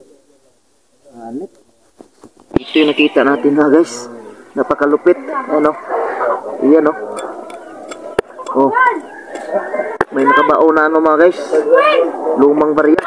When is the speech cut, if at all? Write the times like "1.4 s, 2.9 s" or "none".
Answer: none